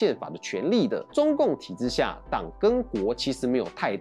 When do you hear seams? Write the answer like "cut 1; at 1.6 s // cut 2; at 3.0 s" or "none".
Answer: cut 1; at 1.1 s